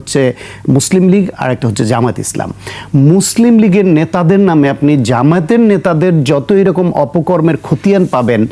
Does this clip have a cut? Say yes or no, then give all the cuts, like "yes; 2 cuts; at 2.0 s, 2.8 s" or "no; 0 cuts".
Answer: no; 0 cuts